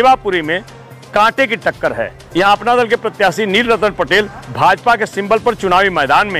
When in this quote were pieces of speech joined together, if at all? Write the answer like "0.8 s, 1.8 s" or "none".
2.2 s

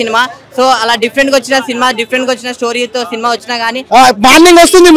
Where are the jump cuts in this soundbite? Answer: 3.8 s

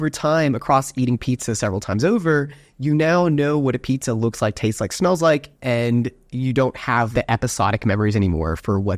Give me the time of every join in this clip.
5.6 s, 7.1 s

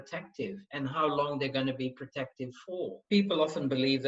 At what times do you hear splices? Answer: 3.0 s

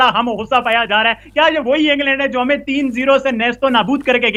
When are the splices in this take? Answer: none

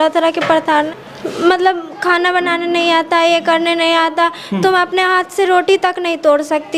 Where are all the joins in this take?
1.0 s

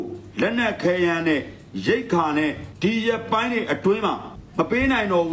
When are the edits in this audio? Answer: 2.7 s, 4.4 s

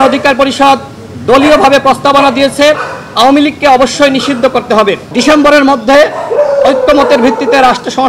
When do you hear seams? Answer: 5.1 s

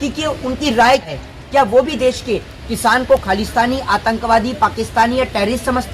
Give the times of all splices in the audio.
1.1 s

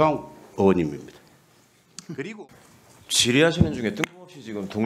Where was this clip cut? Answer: 2.4 s

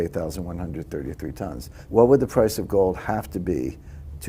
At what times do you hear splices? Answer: 1.7 s

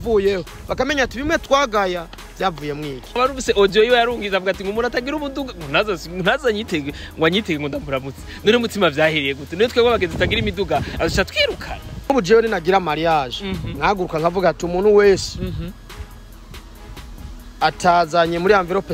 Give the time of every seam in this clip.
3.1 s, 12.1 s

